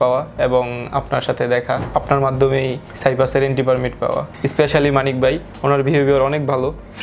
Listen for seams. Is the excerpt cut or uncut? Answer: cut